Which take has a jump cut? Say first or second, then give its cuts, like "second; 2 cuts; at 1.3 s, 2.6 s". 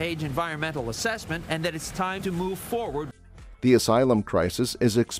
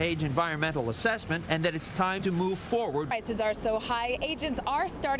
second; 1 cut; at 3.1 s